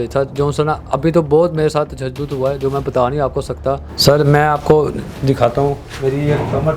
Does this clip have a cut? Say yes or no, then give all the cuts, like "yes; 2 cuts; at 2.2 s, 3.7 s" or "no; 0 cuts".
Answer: yes; 1 cut; at 3.9 s